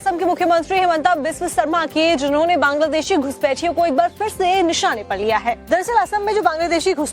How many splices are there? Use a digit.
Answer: 0